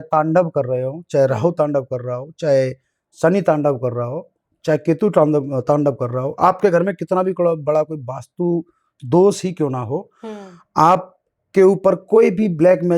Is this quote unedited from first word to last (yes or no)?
yes